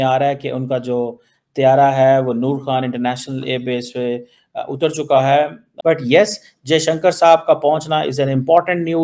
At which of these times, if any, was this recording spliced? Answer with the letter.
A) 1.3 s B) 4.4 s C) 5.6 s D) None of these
C